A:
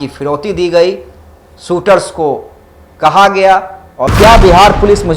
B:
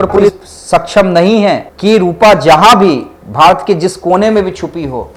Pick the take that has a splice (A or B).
A